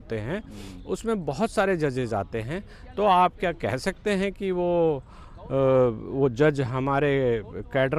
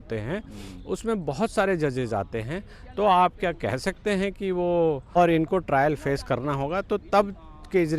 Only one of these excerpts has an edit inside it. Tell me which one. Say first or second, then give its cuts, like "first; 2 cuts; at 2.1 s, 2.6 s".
second; 1 cut; at 5.2 s